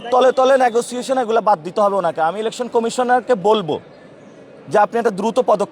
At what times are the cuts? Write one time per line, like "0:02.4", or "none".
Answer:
none

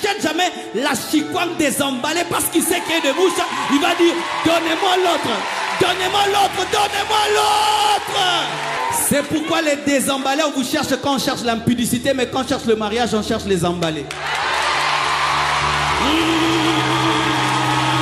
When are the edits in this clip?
0:08.8

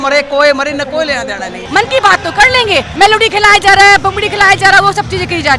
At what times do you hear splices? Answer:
0:01.6
0:02.9

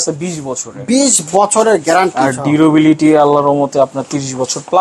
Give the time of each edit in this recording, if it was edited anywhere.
none

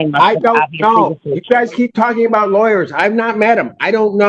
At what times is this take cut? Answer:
none

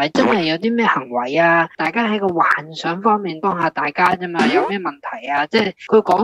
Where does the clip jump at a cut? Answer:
none

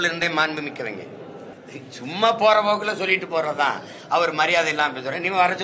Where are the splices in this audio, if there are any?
0:01.5

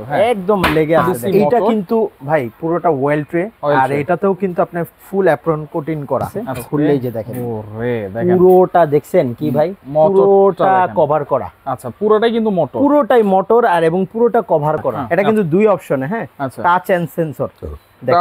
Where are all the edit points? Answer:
0:01.2
0:06.4
0:15.0

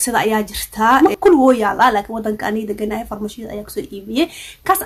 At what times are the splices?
0:01.0

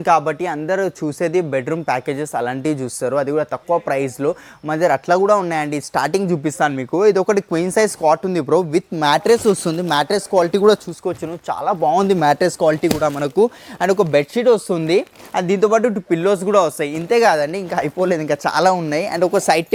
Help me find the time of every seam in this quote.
none

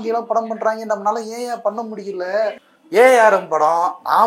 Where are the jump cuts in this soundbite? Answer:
0:02.7

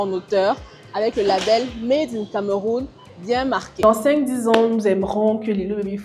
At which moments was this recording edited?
none

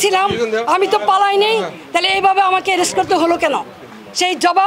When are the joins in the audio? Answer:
none

